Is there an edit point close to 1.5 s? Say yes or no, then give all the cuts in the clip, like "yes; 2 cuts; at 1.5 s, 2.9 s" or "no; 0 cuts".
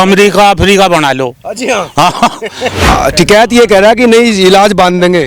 no; 1 cut; at 2.9 s